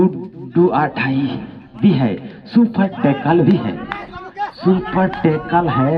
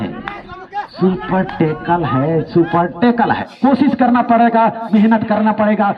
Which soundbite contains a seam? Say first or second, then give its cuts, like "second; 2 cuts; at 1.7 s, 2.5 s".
second; 1 cut; at 3.4 s